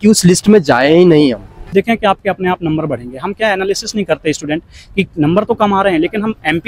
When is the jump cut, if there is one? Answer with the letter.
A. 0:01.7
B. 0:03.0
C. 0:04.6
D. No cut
A